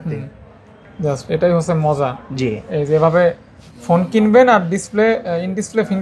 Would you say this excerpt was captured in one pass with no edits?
yes; 0 cuts

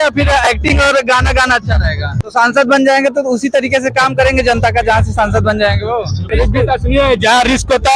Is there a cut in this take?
yes; 2 cuts; at 2.1 s, 6.3 s

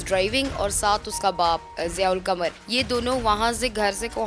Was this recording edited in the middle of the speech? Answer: yes; 2 cuts; at 1.7 s, 2.6 s

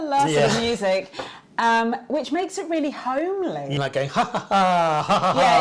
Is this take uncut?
no; 1 cut; at 3.7 s

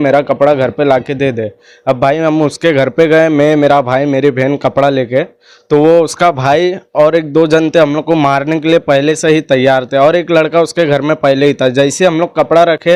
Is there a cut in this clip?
no; 0 cuts

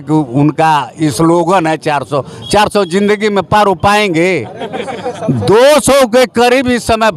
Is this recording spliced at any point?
no; 0 cuts

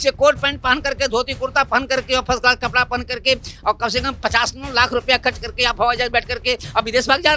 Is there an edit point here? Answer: no; 0 cuts

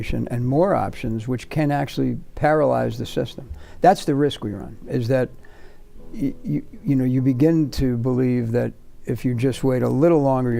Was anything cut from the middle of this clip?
no; 0 cuts

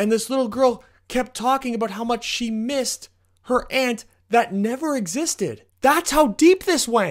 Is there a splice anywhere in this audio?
yes; 1 cut; at 5.6 s

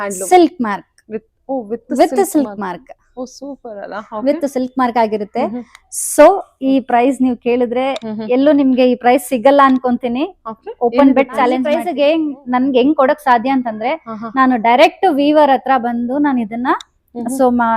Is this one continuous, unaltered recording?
no; 1 cut; at 11.9 s

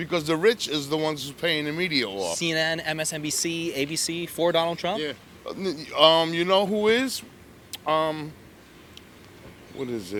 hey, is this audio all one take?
yes; 0 cuts

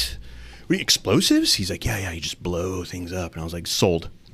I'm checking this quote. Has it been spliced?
no; 0 cuts

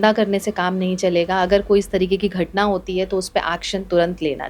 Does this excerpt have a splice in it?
no; 0 cuts

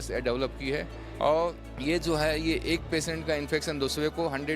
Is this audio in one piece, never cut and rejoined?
no; 1 cut; at 1.7 s

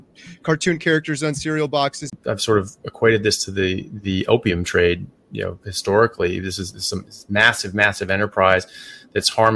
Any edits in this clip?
yes; 1 cut; at 2.2 s

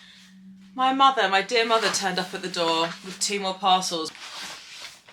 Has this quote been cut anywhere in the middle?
yes; 1 cut; at 4.1 s

